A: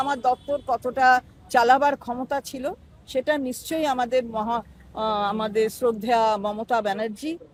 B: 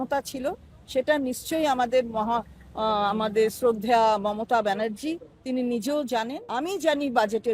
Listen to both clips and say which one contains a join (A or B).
B